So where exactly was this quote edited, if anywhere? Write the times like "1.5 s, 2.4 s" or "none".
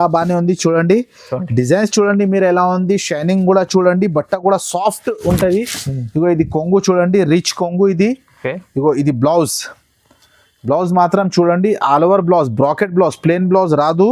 none